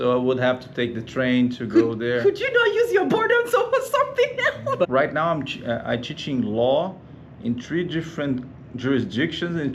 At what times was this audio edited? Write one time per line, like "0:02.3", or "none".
0:04.9